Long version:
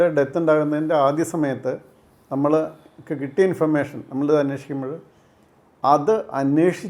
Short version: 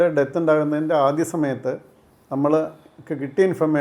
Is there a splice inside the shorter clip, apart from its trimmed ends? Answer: no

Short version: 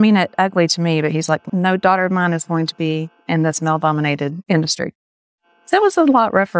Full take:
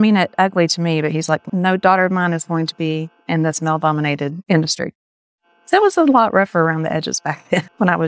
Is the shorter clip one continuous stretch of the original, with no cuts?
yes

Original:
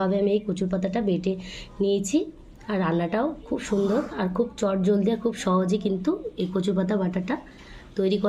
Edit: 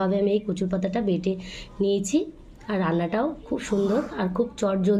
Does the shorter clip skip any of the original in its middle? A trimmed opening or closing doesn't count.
no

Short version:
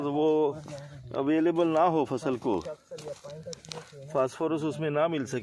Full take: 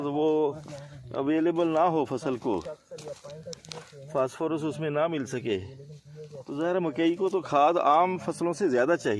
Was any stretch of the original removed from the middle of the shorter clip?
no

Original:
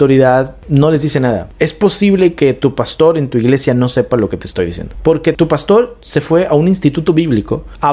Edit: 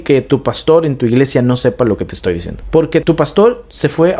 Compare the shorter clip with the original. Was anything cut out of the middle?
no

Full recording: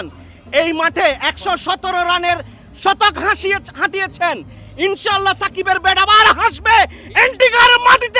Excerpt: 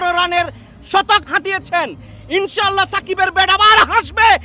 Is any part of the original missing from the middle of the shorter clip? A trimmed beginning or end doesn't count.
yes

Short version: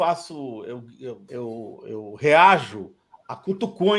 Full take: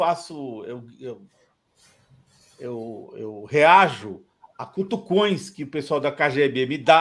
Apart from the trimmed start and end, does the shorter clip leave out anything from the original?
yes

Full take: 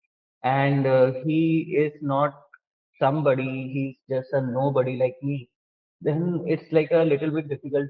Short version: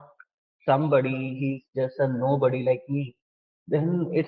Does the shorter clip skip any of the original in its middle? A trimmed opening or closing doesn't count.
no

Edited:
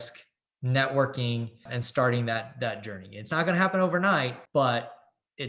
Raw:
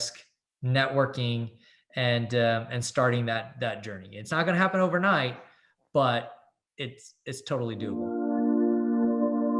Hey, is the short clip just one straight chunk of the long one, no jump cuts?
no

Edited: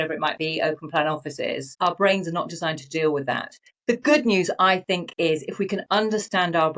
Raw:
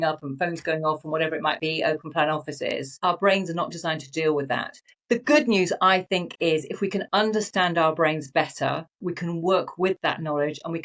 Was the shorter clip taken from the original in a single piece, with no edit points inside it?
yes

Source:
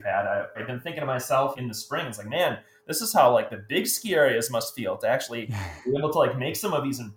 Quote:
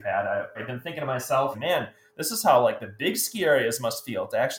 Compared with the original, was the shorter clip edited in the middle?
yes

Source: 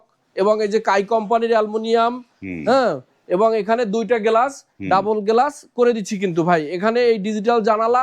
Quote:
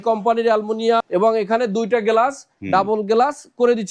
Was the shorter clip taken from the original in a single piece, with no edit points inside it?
no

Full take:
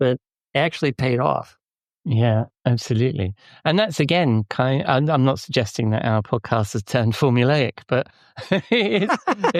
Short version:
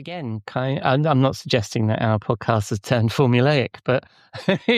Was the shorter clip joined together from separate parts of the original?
no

